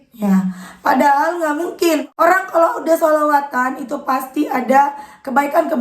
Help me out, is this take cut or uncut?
cut